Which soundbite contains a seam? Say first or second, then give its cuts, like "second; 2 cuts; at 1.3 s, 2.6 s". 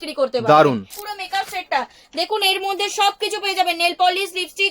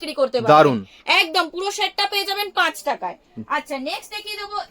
first; 1 cut; at 0.9 s